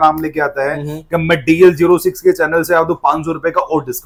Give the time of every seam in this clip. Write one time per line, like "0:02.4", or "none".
none